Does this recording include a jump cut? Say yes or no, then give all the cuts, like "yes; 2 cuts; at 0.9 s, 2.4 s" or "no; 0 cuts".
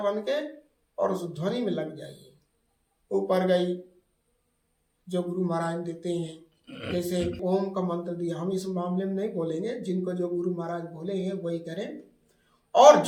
no; 0 cuts